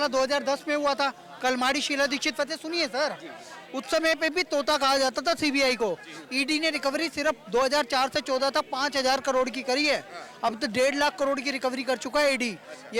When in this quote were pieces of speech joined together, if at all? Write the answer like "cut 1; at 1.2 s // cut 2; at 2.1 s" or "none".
none